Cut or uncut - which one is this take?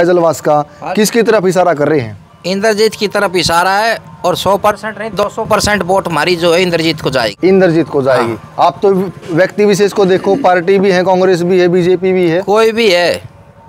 uncut